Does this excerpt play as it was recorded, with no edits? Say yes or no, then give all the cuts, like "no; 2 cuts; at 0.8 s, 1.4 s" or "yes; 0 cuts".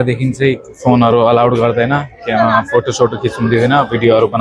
yes; 0 cuts